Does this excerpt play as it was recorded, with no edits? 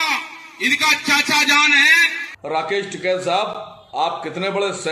no; 1 cut; at 2.3 s

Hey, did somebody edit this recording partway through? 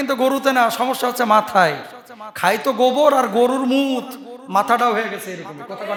no; 0 cuts

